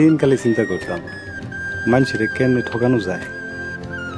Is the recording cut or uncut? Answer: uncut